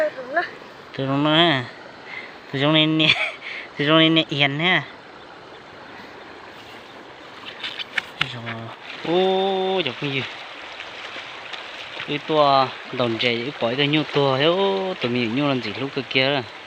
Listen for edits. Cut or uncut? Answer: cut